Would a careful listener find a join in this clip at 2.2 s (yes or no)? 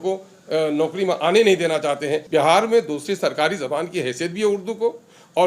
yes